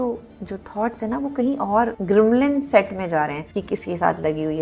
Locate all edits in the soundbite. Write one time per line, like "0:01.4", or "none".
0:02.0
0:03.5